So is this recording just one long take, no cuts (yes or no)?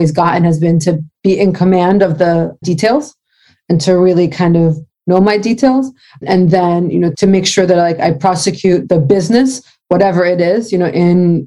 no